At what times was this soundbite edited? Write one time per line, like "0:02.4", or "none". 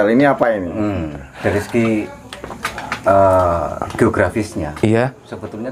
0:01.3

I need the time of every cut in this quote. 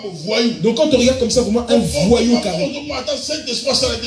none

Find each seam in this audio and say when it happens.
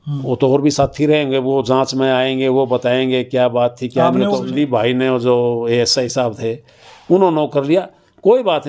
0:04.4

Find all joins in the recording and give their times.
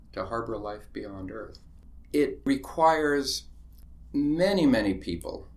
0:02.5

